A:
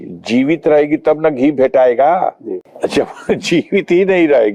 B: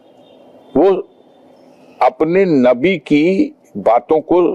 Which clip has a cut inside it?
A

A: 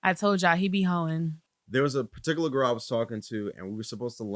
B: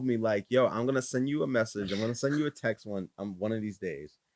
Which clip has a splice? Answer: A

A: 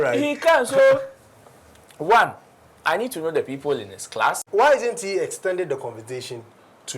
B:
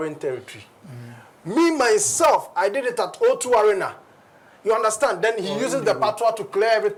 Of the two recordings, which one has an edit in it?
A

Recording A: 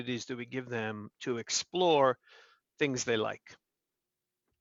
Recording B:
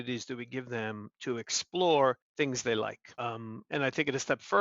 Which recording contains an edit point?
B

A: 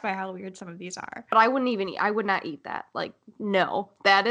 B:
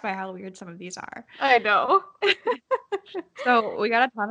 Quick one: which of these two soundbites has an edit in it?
A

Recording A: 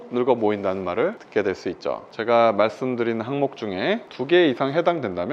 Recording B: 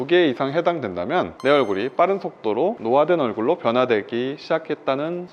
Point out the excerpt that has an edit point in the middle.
A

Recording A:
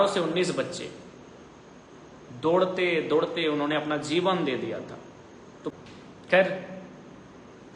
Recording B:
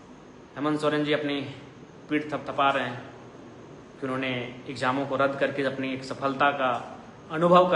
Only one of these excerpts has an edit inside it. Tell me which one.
A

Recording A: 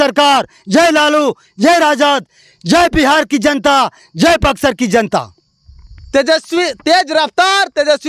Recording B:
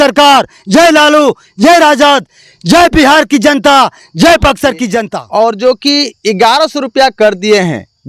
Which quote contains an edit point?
B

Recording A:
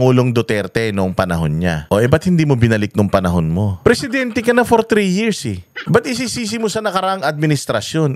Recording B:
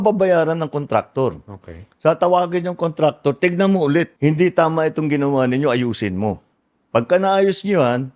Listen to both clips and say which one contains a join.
A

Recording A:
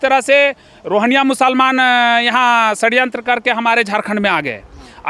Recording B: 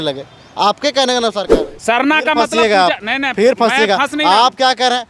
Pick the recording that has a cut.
B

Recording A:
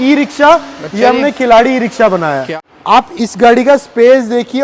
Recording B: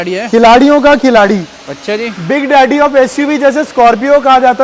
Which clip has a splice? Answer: A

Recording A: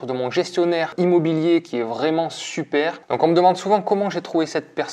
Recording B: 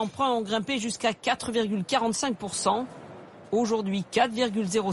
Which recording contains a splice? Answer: A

